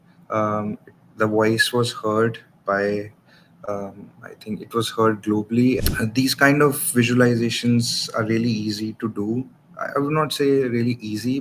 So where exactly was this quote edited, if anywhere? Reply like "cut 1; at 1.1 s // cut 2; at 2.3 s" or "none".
cut 1; at 5.8 s